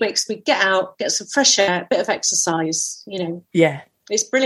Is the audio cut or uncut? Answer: cut